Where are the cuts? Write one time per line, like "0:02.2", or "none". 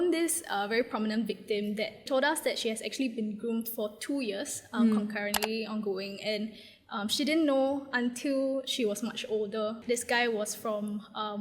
0:02.0
0:09.8